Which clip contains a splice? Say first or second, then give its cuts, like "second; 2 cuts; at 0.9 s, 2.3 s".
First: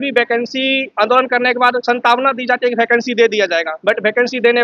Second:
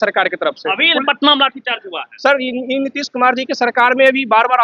first; 3 cuts; at 0.9 s, 1.8 s, 3.7 s